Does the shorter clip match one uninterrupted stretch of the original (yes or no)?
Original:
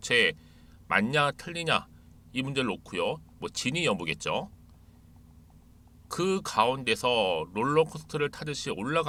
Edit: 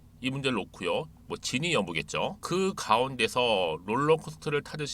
no